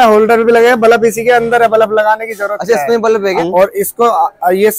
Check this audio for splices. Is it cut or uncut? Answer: cut